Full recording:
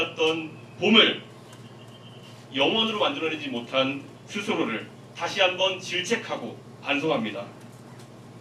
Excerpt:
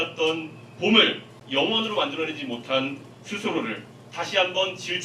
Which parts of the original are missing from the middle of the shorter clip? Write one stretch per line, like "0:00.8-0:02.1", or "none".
0:01.3-0:02.4